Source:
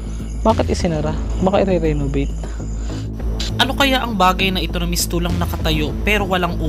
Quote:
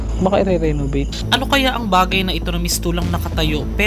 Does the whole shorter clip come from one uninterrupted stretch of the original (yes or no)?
no